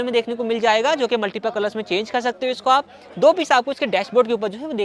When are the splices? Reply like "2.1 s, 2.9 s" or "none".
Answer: none